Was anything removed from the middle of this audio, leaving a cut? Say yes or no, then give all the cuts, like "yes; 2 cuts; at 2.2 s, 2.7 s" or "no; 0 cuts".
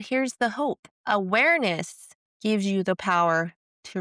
yes; 1 cut; at 0.9 s